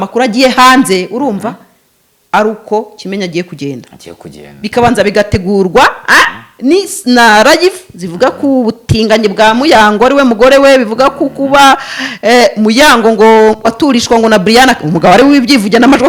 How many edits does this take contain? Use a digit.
0